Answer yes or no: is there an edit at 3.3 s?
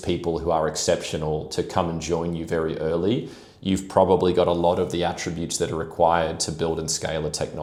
no